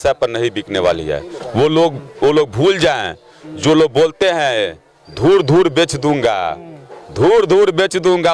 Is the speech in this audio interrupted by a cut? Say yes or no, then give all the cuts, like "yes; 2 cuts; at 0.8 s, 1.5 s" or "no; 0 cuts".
no; 0 cuts